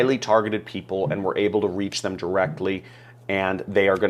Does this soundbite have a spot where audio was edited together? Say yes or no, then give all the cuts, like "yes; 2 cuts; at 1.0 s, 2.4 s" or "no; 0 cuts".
no; 0 cuts